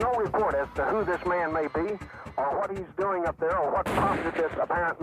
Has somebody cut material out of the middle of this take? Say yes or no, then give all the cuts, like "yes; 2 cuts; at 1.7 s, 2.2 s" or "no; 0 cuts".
no; 0 cuts